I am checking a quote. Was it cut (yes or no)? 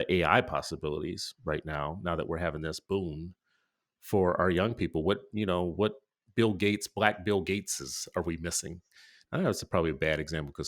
no